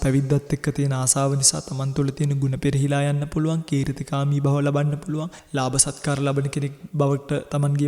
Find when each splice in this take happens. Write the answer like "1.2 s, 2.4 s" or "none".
5.4 s, 6.8 s